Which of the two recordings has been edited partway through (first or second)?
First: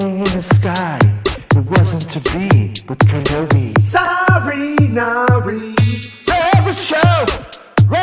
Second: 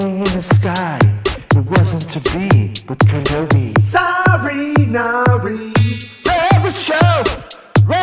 first